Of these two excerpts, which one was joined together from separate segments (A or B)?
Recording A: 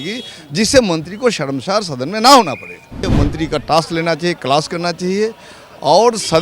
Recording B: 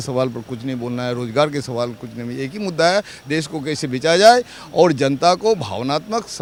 A